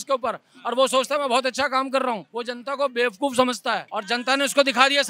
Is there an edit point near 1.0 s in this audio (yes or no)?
no